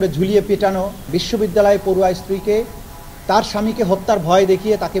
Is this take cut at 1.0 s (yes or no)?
yes